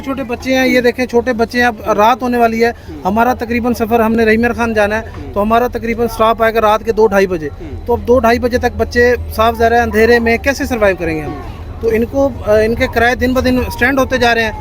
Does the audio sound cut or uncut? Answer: uncut